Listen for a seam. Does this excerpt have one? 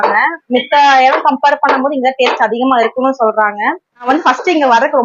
yes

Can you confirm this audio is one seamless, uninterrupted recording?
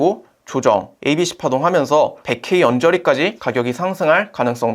no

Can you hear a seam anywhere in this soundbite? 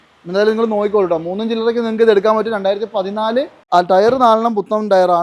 yes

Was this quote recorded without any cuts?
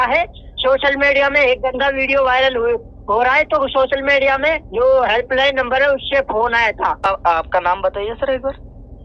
no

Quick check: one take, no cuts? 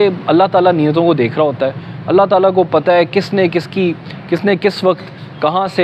yes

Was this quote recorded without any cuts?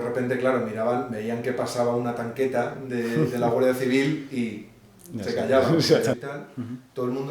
no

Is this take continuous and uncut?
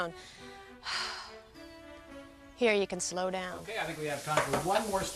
yes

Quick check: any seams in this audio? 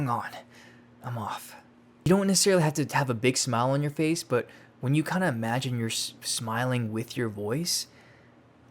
yes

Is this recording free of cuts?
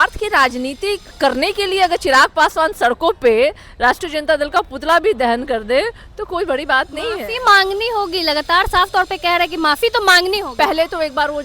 no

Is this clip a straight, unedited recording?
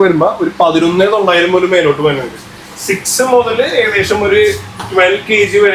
yes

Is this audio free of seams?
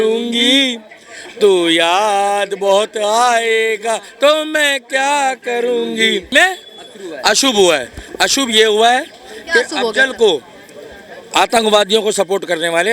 no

